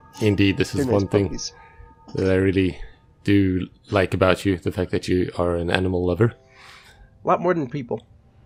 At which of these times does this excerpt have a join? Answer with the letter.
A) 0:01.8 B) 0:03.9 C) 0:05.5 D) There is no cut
D